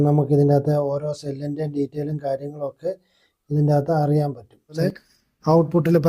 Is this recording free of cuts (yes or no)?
no